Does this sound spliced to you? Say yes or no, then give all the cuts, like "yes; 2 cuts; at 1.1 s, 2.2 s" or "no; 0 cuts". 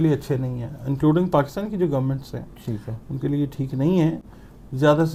no; 0 cuts